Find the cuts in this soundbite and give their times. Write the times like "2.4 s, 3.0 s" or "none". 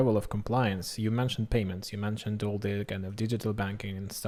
none